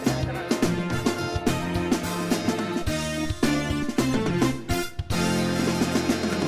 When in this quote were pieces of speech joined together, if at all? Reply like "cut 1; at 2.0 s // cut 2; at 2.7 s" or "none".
none